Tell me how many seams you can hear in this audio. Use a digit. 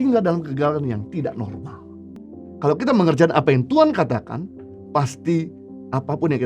1